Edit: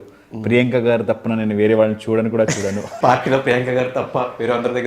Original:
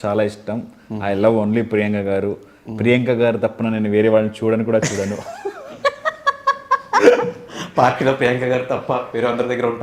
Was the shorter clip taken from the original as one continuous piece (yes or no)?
no